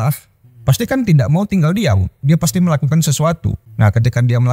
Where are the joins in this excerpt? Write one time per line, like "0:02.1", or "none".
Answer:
0:03.6